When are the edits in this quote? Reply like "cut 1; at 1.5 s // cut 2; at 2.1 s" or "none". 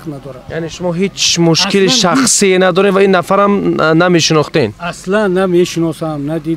none